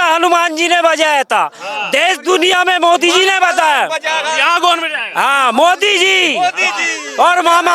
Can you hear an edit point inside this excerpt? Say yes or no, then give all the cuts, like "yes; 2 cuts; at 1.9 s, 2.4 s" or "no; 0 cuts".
no; 0 cuts